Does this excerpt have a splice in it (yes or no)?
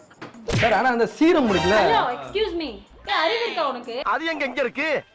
yes